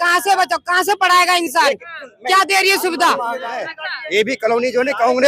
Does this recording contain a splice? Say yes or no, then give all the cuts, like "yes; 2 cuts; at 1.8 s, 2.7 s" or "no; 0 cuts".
yes; 1 cut; at 3.6 s